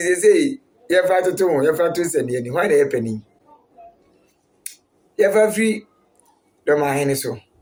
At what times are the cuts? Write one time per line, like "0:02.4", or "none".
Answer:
none